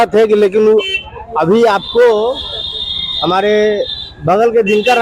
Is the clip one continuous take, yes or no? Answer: yes